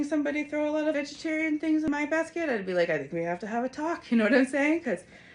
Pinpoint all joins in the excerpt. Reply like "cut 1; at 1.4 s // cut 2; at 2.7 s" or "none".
cut 1; at 1.0 s // cut 2; at 1.9 s